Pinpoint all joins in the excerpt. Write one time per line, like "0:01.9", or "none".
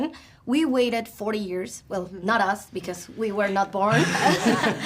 none